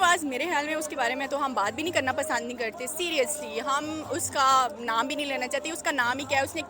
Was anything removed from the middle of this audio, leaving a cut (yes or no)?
no